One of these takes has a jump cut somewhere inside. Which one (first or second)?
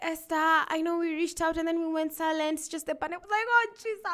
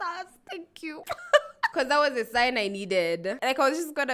second